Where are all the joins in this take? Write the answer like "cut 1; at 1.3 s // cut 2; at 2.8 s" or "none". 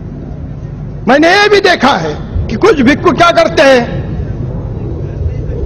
none

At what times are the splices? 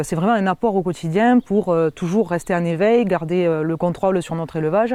none

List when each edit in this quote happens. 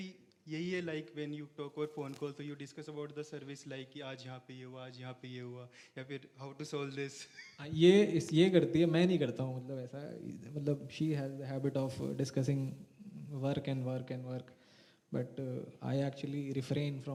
none

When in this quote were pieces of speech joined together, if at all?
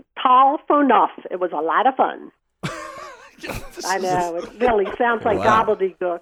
none

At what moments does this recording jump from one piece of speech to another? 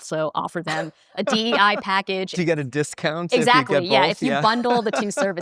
cut 1; at 2.4 s

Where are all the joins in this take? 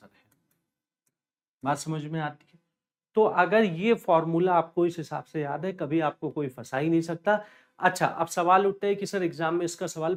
none

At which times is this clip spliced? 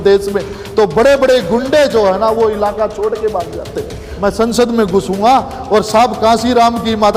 cut 1; at 4.0 s

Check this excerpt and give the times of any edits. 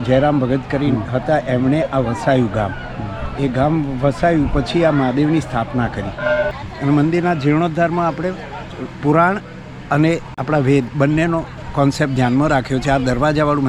cut 1; at 6.6 s // cut 2; at 10.3 s // cut 3; at 11.6 s

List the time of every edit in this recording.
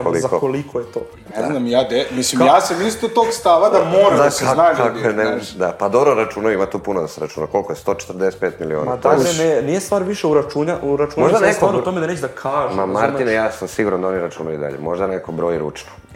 none

